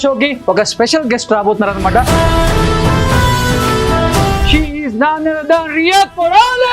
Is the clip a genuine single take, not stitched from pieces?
no; 2 cuts; at 2.1 s, 4.4 s

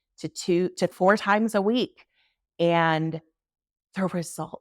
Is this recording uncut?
no; 1 cut; at 0.9 s

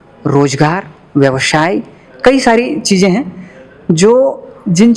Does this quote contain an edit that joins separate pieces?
no; 0 cuts

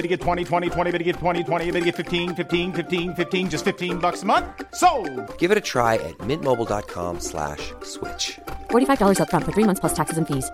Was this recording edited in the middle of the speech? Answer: no; 0 cuts

